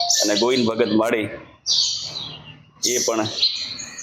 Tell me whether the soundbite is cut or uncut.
uncut